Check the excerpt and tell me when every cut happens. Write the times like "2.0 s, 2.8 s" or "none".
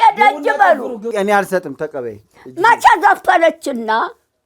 1.1 s